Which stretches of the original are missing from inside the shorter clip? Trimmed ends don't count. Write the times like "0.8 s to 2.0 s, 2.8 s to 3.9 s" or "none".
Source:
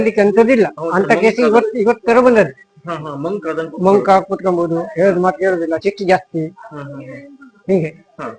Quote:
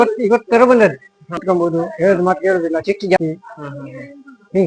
2.9 s to 4.3 s, 6.1 s to 6.3 s

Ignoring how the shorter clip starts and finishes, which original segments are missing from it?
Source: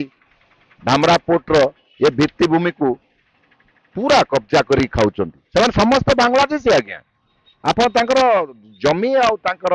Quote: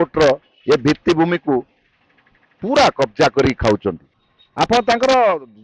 5.3 s to 7.1 s

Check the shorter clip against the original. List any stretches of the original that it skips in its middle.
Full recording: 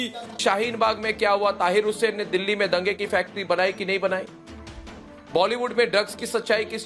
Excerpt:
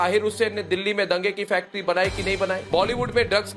4.2 s to 5.2 s

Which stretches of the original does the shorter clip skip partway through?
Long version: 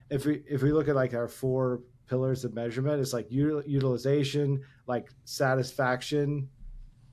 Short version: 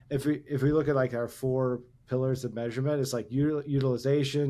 none

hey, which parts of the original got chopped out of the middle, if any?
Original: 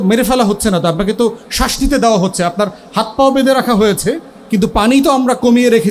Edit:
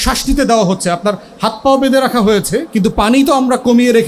4.1 s to 4.4 s

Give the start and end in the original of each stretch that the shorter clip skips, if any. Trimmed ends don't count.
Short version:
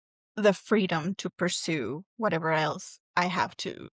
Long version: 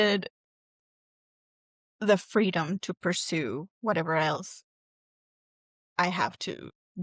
4.6 s to 5.8 s

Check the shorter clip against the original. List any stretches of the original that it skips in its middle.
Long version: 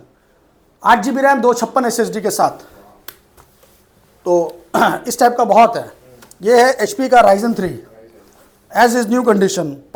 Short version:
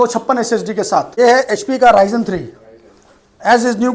2.6 s to 6.4 s

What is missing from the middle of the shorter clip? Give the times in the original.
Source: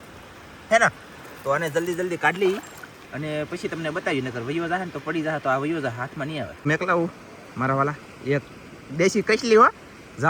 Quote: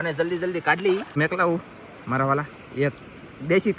2.6 s to 6.6 s

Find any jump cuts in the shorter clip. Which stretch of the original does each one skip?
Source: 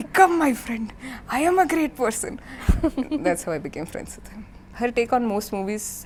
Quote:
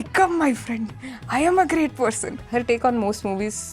2.3 s to 4.6 s

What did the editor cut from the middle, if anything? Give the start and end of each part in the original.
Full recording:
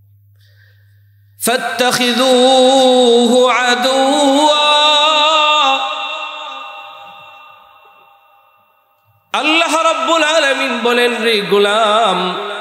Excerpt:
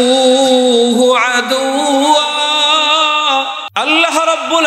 6.0 s to 9.2 s

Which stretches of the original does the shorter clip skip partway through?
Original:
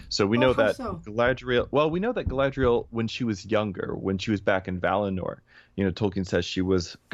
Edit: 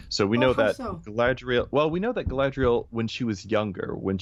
none

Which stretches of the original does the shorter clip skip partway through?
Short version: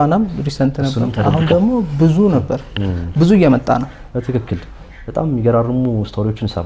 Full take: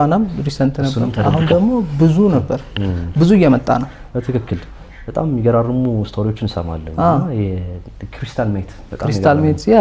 none

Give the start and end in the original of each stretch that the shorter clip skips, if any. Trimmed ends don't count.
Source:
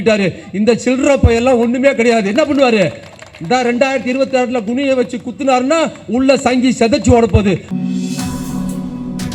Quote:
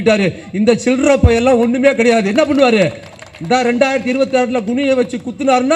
none

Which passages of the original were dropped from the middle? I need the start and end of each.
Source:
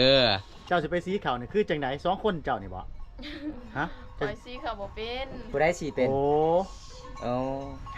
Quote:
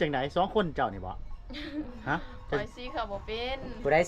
none

